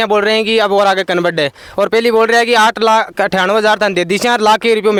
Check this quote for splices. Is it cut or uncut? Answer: uncut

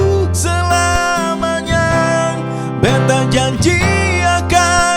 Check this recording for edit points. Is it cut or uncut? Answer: uncut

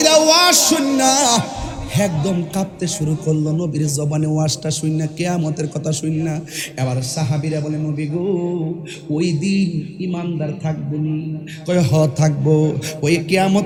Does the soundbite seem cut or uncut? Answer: uncut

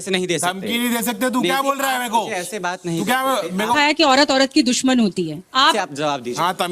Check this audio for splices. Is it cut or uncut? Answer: cut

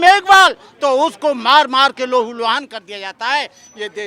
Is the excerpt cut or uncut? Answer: uncut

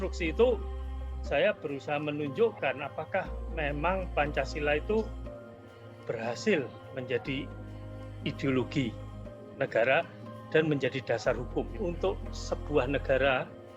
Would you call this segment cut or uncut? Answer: cut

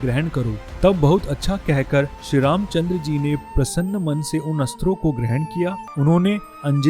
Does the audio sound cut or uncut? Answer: cut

